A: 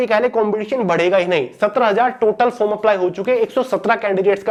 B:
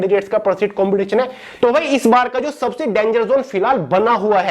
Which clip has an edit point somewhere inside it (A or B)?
B